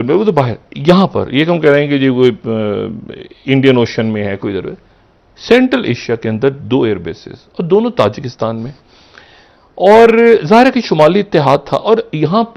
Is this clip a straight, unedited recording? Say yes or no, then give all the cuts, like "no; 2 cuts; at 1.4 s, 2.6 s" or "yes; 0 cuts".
yes; 0 cuts